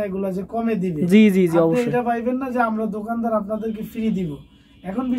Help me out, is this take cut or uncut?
uncut